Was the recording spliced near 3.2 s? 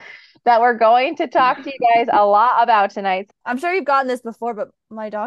yes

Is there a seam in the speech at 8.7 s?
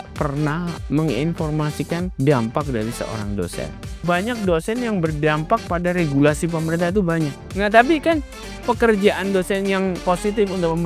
no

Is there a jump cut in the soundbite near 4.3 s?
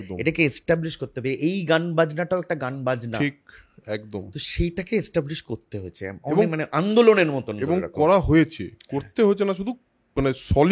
no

